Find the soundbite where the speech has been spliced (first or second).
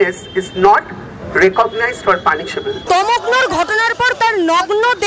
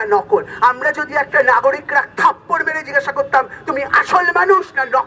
first